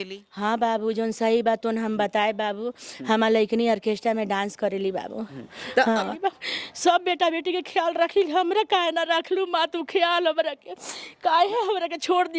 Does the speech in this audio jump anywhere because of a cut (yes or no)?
yes